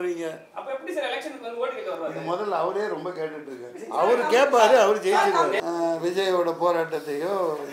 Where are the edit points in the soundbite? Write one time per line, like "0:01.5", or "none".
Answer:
0:05.6